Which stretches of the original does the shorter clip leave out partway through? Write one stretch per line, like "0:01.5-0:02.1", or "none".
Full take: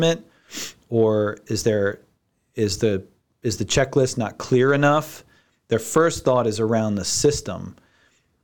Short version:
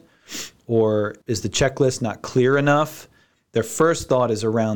0:01.4-0:03.3